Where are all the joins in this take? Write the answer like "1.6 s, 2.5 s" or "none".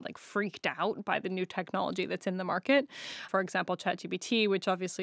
3.3 s

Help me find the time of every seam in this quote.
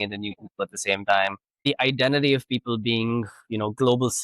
1.6 s

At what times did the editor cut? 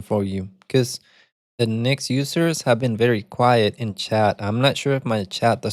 none

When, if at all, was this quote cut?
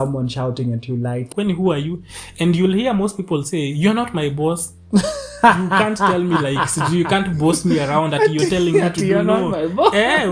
1.3 s

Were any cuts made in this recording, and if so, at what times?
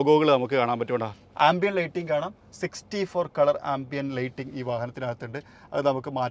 1.2 s

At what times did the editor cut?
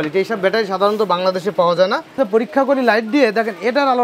2.2 s

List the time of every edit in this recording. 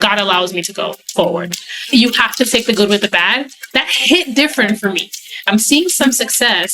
1.9 s, 3.7 s, 5.4 s

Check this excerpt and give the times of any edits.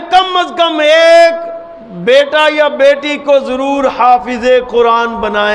none

